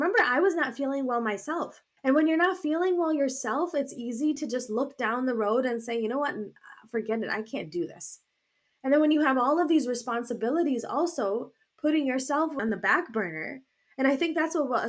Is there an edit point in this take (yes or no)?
yes